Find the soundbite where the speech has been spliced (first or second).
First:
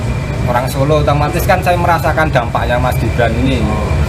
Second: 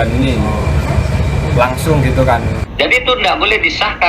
second